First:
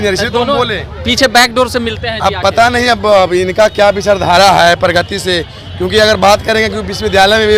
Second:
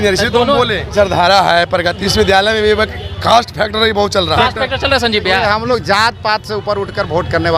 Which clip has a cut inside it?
second; 3 cuts; at 0.9 s, 2.0 s, 4.4 s

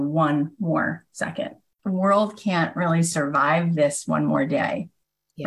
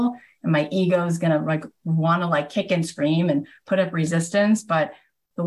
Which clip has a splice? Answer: first; 1 cut; at 1.8 s

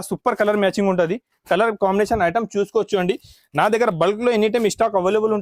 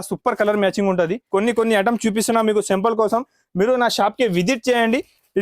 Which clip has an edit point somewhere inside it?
second; 1 cut; at 1.2 s

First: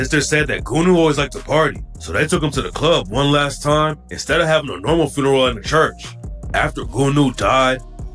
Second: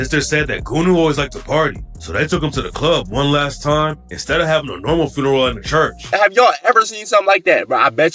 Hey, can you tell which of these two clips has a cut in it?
second; 1 cut; at 6.0 s

